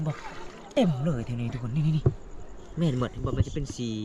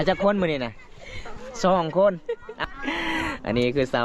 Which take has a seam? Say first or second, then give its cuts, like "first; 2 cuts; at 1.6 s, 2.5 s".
second; 1 cut; at 2.6 s